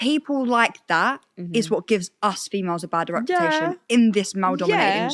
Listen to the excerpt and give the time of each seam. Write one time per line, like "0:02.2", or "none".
none